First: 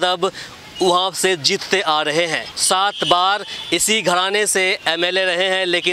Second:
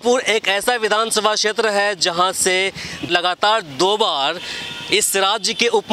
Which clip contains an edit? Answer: first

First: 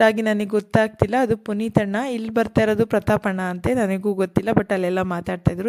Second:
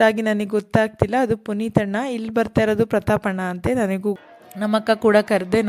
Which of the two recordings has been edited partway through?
second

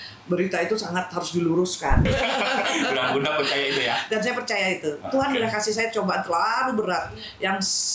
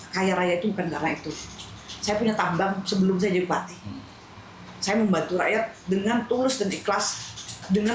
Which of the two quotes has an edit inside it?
first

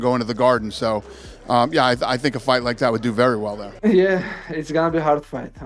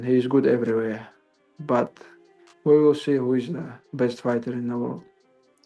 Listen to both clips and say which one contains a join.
first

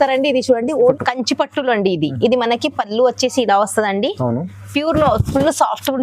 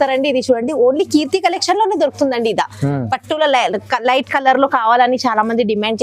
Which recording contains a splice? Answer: first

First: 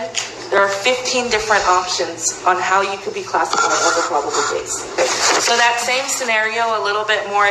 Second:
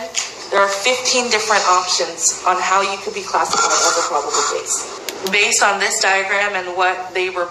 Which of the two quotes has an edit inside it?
second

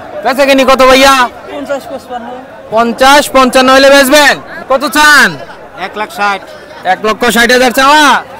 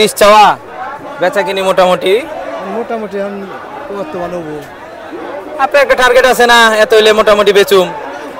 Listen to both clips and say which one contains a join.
first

